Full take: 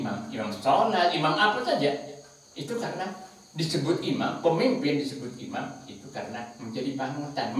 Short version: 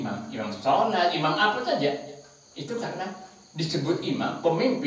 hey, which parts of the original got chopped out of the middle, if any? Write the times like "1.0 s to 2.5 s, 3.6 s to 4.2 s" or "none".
none